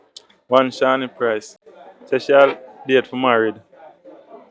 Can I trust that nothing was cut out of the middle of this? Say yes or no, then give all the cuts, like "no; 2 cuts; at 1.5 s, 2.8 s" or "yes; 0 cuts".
yes; 0 cuts